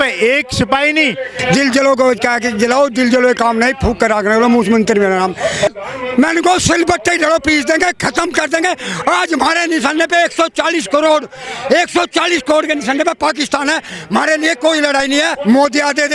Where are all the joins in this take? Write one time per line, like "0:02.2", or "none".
0:01.3
0:05.7
0:15.3